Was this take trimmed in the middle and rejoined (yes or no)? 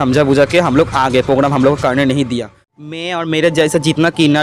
yes